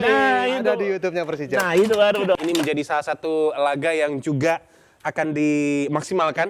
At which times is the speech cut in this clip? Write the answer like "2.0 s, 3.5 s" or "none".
2.4 s